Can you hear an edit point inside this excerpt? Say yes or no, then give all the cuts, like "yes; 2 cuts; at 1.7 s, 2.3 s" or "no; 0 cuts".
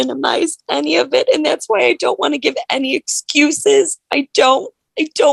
no; 0 cuts